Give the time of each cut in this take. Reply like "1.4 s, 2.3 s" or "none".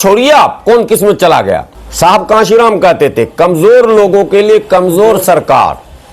1.8 s